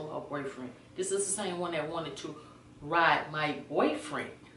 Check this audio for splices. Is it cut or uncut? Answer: uncut